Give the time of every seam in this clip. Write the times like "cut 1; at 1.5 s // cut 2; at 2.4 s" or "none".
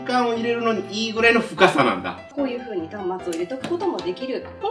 cut 1; at 2.2 s